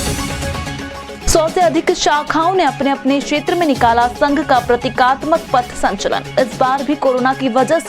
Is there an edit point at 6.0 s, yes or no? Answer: no